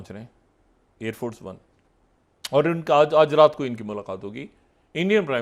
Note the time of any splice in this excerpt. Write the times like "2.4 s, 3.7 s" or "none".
1.7 s